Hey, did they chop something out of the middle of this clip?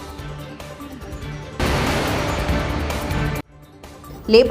no; 0 cuts

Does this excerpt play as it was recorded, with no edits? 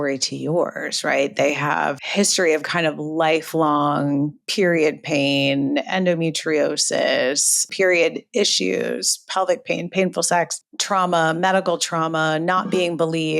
no; 2 cuts; at 2.0 s, 7.6 s

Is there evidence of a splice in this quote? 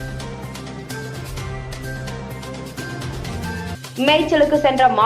no; 0 cuts

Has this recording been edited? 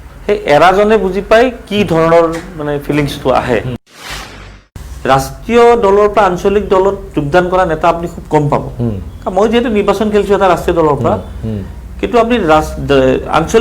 yes; 1 cut; at 4.4 s

